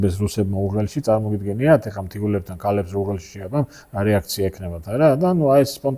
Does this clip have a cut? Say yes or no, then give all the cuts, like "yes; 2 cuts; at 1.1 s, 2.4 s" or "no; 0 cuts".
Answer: no; 0 cuts